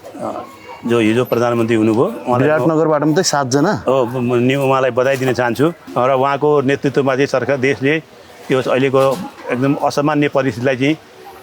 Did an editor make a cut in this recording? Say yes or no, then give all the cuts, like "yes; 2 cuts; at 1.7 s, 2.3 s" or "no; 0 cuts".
yes; 1 cut; at 5.9 s